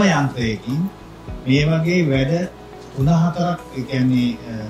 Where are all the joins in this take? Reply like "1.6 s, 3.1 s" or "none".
none

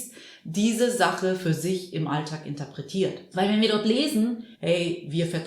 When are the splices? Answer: 3.2 s, 4.5 s

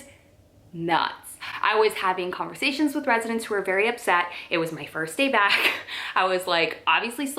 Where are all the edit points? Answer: none

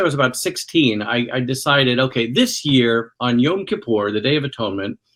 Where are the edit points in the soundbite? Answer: none

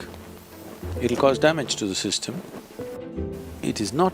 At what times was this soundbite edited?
3.0 s

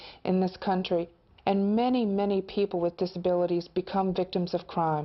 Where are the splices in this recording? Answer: 3.1 s

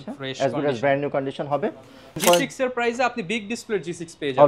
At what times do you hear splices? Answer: 2.2 s

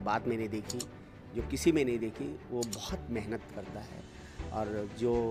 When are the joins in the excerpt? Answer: none

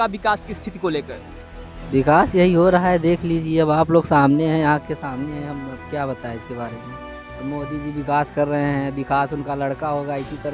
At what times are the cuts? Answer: none

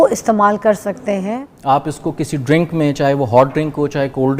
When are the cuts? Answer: 1.4 s

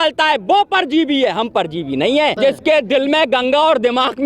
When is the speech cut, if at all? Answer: 2.4 s

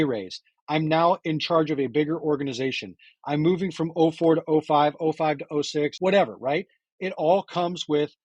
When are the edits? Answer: 1.2 s, 5.9 s

